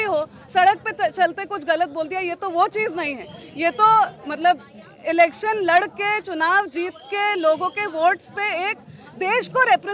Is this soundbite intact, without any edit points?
yes; 0 cuts

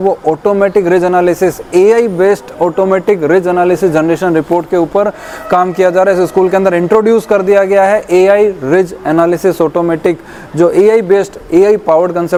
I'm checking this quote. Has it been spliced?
no; 0 cuts

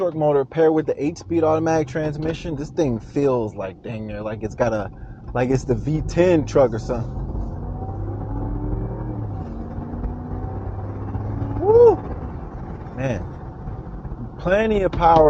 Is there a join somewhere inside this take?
no; 0 cuts

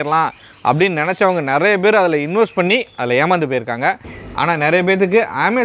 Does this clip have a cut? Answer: yes; 1 cut; at 4.1 s

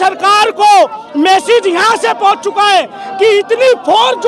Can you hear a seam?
no; 0 cuts

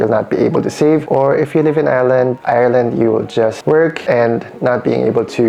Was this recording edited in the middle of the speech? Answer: no; 0 cuts

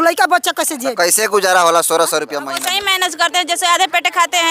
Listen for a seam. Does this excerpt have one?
yes; 1 cut; at 2.5 s

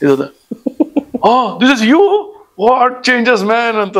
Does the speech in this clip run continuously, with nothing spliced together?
yes; 0 cuts

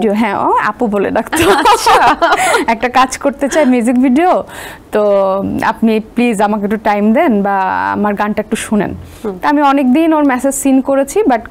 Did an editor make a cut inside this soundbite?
no; 0 cuts

